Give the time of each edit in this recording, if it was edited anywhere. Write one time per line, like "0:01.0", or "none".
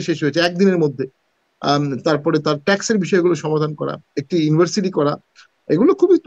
none